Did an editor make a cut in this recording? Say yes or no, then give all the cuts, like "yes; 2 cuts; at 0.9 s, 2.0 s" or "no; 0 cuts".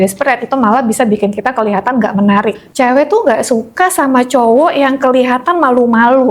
yes; 1 cut; at 2.6 s